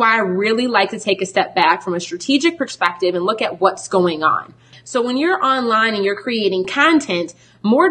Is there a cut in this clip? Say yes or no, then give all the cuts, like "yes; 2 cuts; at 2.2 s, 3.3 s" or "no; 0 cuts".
yes; 1 cut; at 4.7 s